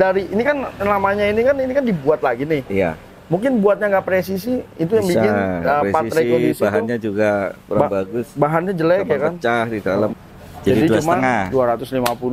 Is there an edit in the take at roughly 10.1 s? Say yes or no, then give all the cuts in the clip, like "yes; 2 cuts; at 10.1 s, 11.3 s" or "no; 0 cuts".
yes; 1 cut; at 10.1 s